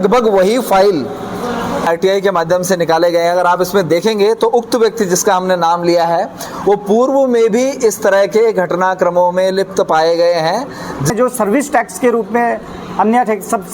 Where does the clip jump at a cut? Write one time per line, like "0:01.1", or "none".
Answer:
0:01.9
0:11.1